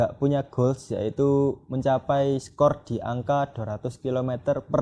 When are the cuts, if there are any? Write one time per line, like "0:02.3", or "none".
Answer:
none